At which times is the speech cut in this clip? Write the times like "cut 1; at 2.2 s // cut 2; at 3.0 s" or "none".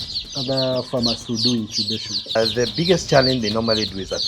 cut 1; at 2.4 s